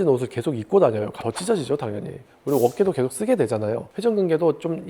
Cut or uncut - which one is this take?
cut